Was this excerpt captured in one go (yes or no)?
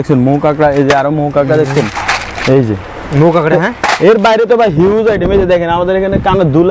yes